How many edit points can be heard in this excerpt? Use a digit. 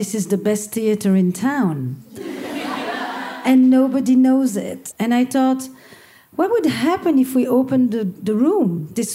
1